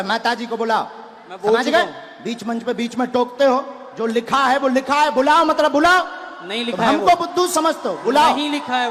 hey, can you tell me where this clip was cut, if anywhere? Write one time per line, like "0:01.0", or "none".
none